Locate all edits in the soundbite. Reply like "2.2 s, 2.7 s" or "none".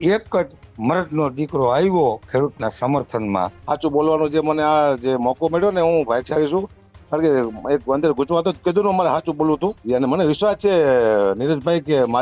3.6 s, 9.8 s